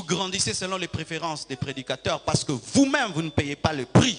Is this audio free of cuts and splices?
yes; 0 cuts

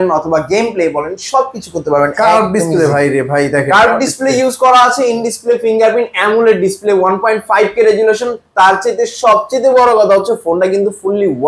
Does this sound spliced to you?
no; 0 cuts

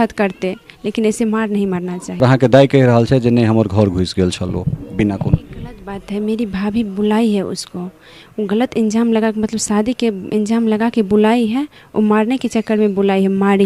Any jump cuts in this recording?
yes; 1 cut; at 2.2 s

